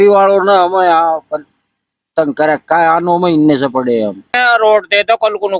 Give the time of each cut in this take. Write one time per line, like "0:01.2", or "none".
0:04.3